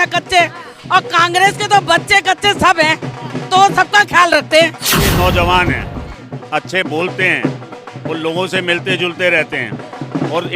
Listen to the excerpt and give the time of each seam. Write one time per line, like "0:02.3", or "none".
0:04.9